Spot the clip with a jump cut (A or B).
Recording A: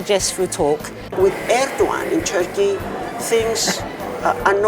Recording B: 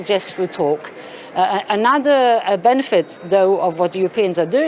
A